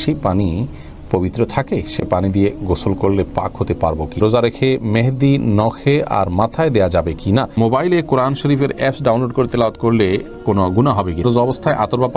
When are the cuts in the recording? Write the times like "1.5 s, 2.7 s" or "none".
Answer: 4.2 s, 7.6 s, 11.2 s